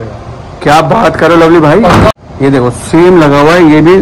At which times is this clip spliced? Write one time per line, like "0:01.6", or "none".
0:02.2

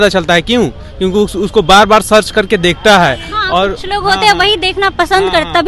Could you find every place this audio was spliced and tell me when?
none

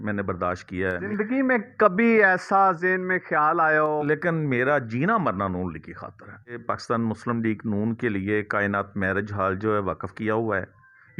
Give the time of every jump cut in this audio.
0:01.1
0:04.0
0:06.6

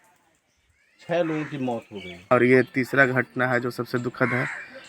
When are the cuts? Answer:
0:02.3

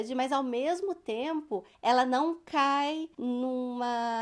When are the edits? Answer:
0:01.7
0:03.1

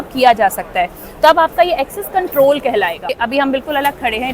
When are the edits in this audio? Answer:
0:03.2

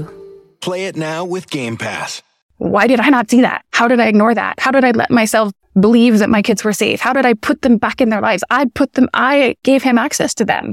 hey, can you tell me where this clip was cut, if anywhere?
0:02.4
0:03.6
0:05.6
0:09.6

